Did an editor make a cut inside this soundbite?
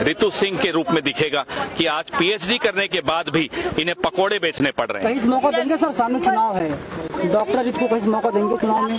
no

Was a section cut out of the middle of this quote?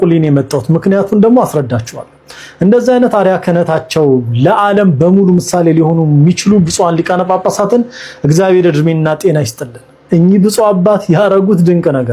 no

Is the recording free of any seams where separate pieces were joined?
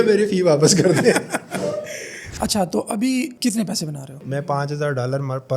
no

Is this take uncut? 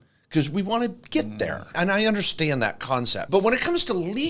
no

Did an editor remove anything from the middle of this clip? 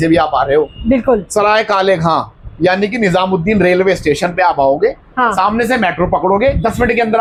no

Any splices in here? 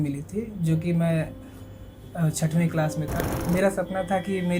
yes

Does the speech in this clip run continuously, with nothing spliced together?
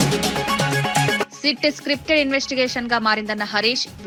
yes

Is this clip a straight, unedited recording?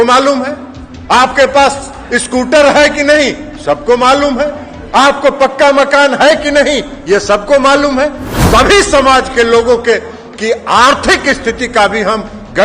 no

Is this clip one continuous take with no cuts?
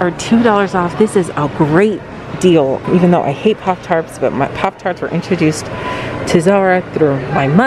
yes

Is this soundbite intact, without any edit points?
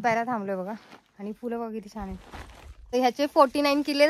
no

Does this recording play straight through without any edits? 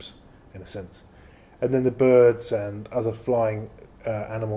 no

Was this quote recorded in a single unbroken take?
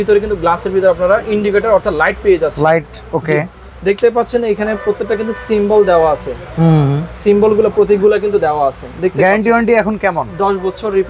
yes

